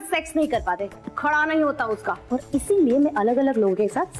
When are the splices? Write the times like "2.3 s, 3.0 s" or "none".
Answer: none